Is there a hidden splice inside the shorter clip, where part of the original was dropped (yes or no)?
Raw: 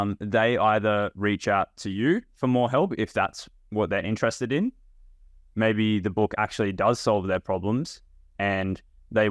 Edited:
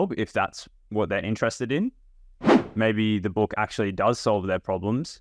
no